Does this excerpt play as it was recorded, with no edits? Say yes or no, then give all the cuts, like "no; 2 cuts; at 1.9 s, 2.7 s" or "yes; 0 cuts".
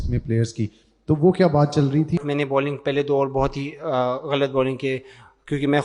no; 1 cut; at 2.2 s